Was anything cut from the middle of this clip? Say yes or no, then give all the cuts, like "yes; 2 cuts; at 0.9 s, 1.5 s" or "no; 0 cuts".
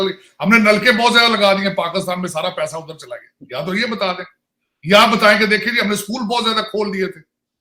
no; 0 cuts